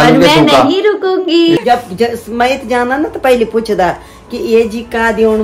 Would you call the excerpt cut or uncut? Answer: cut